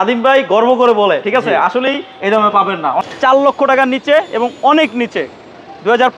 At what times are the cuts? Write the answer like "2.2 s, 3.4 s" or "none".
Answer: 3.0 s